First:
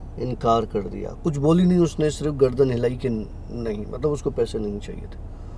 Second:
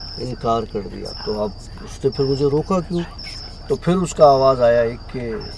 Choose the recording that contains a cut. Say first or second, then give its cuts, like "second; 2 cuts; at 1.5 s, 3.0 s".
second; 2 cuts; at 1.1 s, 3.1 s